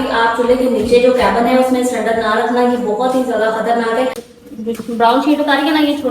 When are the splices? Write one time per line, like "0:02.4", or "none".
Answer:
0:04.3